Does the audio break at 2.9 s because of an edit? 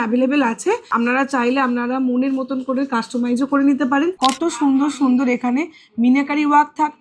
no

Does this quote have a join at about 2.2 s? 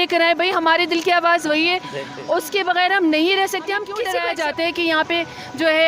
no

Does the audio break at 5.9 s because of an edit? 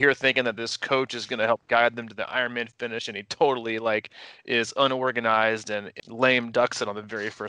yes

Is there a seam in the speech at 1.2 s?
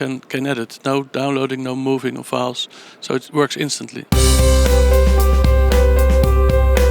no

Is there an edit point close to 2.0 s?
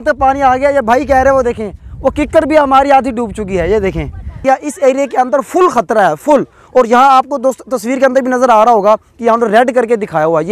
no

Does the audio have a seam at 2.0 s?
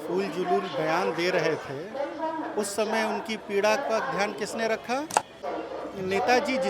no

